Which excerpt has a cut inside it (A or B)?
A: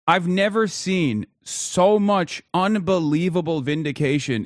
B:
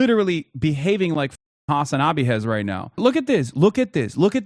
B